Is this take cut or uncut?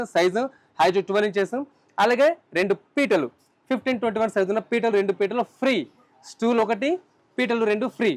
uncut